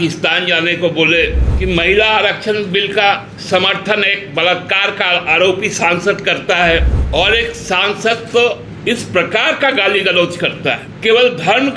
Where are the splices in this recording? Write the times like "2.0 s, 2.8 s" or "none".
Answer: 1.5 s, 3.3 s, 7.0 s, 8.7 s, 10.9 s